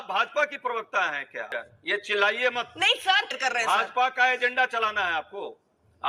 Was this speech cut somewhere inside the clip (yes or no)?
yes